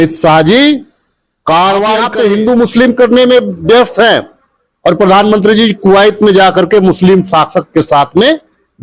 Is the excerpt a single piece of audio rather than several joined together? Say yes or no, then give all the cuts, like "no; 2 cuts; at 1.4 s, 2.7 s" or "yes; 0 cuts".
no; 1 cut; at 2.1 s